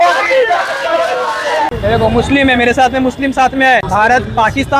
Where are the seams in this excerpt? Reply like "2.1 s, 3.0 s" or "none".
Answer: 1.7 s, 3.8 s